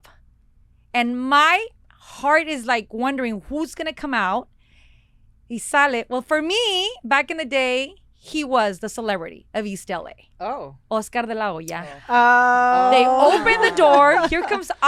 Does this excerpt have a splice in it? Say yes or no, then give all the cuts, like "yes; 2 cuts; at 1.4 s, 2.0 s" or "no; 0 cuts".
no; 0 cuts